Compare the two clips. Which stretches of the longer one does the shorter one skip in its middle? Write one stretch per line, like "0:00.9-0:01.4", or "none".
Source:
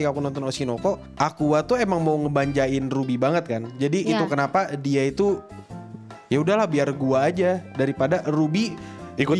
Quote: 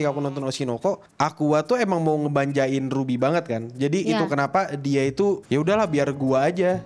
0:05.4-0:06.2